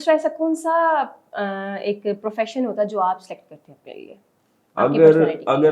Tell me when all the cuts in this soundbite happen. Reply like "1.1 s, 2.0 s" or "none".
none